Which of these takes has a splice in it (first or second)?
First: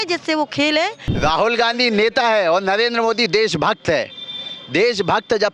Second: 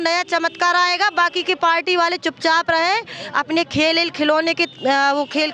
first